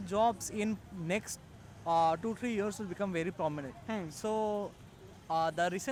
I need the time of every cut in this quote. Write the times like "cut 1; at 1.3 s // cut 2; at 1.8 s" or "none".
none